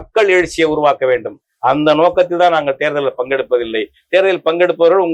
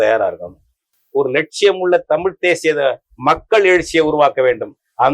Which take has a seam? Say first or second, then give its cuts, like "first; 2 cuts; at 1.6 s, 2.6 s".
second; 1 cut; at 1.0 s